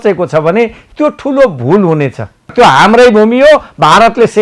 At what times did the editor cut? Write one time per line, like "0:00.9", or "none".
0:02.5